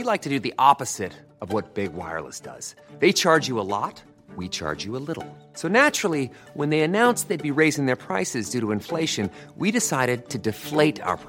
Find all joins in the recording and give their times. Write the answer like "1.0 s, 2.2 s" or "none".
none